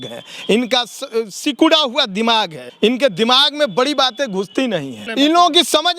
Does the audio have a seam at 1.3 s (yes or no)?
no